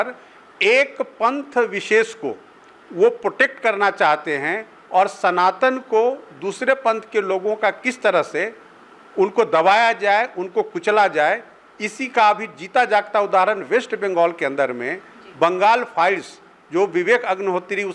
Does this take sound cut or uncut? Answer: uncut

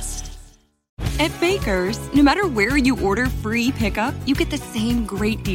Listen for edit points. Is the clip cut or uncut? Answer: cut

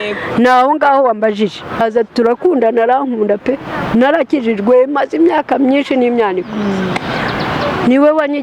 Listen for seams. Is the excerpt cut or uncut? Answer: cut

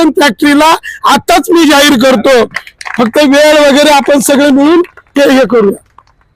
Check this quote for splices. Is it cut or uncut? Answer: uncut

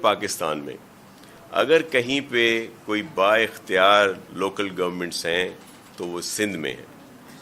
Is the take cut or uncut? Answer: uncut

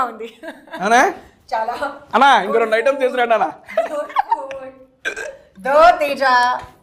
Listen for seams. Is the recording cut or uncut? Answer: uncut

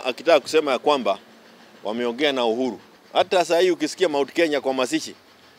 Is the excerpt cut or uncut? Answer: cut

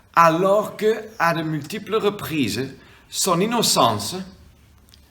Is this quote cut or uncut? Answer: uncut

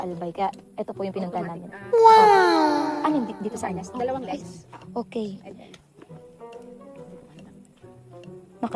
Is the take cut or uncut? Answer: uncut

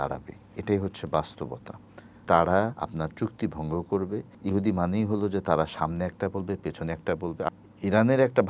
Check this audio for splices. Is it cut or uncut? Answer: cut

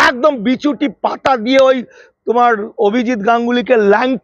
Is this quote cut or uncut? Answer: uncut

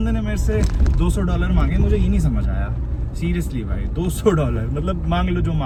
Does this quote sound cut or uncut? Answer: uncut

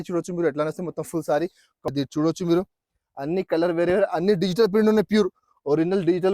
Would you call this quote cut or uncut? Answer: cut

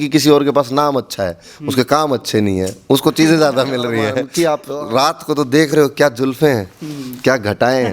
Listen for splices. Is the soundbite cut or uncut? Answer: cut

